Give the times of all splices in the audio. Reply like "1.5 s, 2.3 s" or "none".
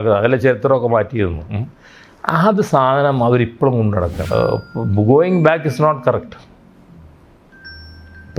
4.2 s